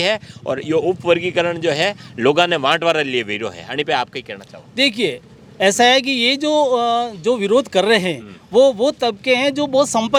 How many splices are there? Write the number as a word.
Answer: zero